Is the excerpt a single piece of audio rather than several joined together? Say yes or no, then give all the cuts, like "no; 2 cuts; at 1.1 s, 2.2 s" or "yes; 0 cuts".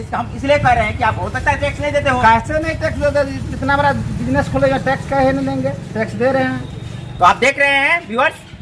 yes; 0 cuts